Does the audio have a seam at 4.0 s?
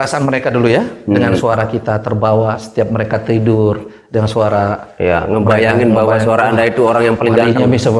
no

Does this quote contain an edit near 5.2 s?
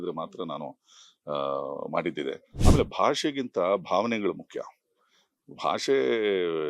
no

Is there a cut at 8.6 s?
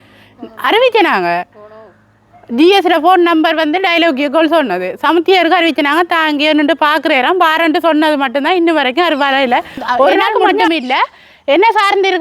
no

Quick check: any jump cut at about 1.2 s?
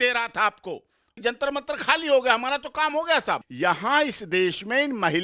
yes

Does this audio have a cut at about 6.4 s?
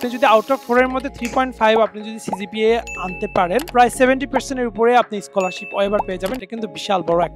yes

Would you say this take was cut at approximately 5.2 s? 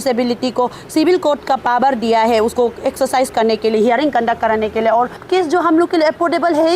yes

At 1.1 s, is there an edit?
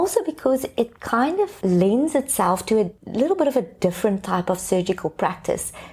no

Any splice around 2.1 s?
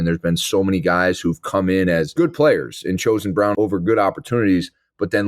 yes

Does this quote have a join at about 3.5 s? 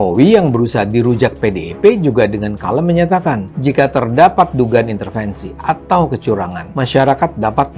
yes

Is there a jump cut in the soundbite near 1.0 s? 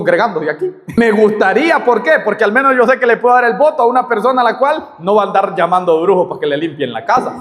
yes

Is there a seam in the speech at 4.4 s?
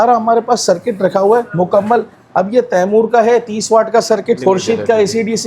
yes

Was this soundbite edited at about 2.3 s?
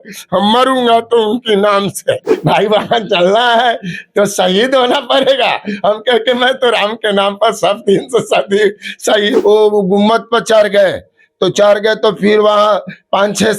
yes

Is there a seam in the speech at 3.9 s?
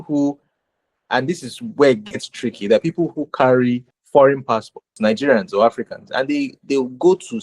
yes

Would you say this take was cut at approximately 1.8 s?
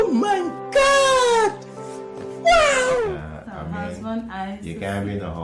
no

